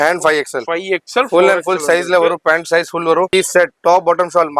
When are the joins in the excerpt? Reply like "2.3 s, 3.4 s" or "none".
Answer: 3.3 s